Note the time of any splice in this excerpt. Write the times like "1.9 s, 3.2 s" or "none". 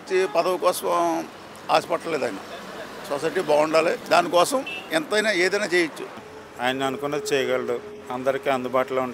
4.0 s, 4.8 s, 6.2 s